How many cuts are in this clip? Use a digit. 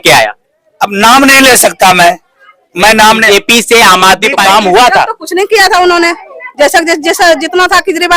1